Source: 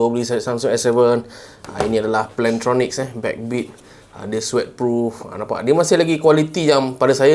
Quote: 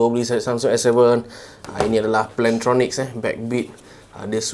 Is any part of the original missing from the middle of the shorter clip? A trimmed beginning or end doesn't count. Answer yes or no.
no